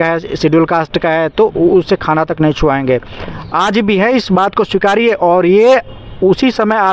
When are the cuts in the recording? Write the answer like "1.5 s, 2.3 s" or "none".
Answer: none